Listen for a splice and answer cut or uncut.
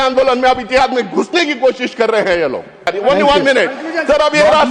cut